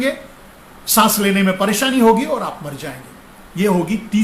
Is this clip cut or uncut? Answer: uncut